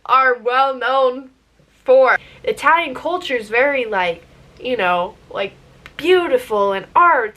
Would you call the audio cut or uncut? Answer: cut